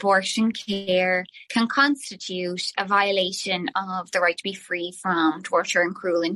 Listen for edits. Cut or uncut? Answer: uncut